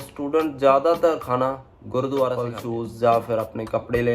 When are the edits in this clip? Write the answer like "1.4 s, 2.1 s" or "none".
2.5 s